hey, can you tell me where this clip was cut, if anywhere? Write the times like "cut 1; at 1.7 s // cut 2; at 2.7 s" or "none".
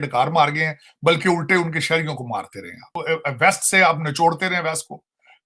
cut 1; at 2.9 s